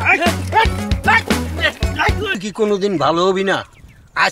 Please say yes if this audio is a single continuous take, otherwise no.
no